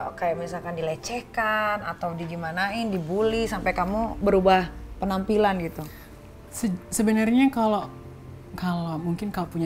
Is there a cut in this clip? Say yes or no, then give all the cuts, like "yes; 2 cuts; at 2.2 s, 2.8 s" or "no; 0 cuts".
no; 0 cuts